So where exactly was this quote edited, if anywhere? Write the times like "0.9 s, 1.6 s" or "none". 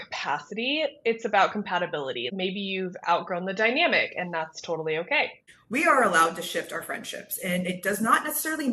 none